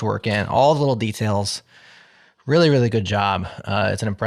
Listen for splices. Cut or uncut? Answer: uncut